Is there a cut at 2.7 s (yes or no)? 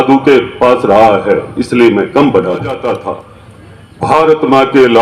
yes